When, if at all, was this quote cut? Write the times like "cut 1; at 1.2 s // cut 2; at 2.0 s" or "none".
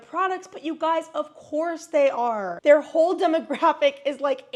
none